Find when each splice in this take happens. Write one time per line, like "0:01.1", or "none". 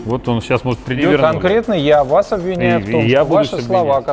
0:01.1